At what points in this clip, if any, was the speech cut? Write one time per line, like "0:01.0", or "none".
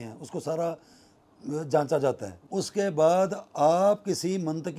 0:02.3

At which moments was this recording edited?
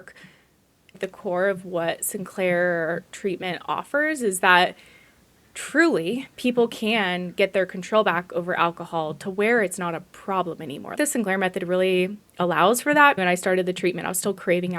0:01.0
0:11.0
0:13.2

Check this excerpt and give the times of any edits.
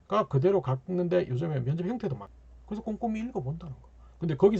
0:02.3

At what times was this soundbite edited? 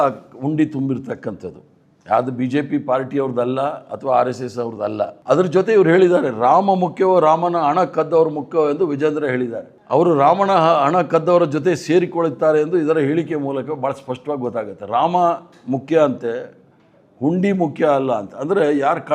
0:05.2

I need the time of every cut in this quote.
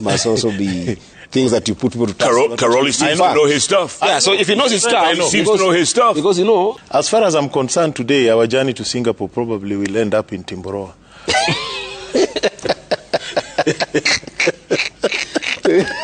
0:06.8

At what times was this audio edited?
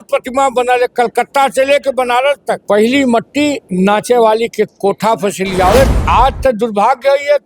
0:02.6
0:03.6
0:05.9

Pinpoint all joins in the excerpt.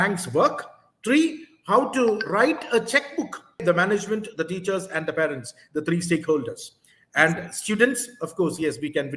0:03.6

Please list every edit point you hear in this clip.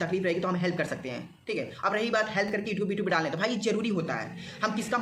none

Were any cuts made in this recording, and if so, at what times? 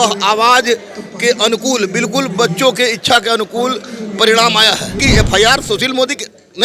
0:05.0

